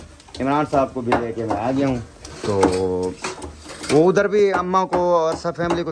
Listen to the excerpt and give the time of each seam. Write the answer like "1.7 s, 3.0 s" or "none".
none